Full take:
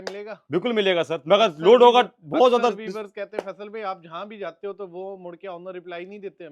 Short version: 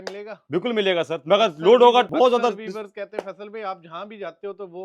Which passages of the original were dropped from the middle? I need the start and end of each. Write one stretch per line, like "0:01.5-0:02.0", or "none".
0:02.1-0:02.3

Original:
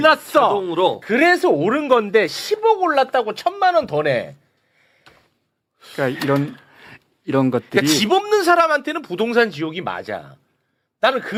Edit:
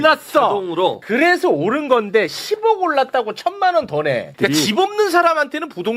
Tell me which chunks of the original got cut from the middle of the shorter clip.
0:04.3-0:07.7

